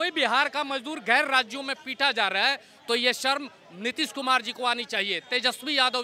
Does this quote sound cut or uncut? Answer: uncut